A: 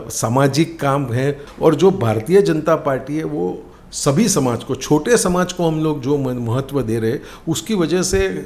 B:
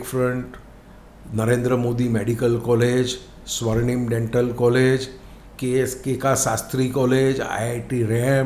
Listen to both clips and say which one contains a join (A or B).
A